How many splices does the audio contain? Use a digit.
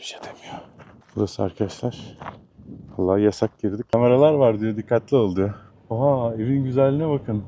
2